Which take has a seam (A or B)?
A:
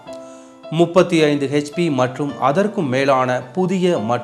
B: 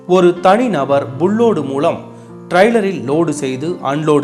A